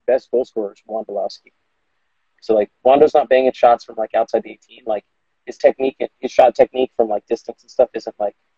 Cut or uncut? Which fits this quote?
uncut